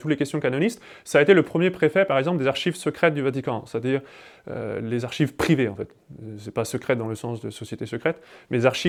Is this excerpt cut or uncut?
uncut